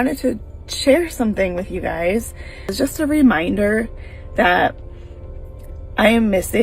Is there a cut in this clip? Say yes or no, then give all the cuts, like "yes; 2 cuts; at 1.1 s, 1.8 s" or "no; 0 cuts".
yes; 1 cut; at 2.7 s